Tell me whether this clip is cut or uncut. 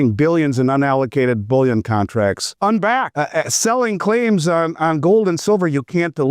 cut